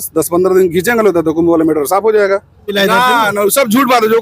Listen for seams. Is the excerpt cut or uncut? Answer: cut